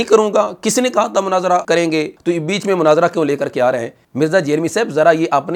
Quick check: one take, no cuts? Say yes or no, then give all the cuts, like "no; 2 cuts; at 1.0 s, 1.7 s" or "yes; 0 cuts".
yes; 0 cuts